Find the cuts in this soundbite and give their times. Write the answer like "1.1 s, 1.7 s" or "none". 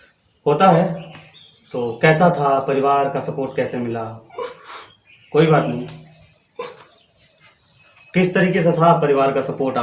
none